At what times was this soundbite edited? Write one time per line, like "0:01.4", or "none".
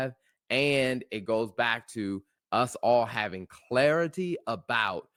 none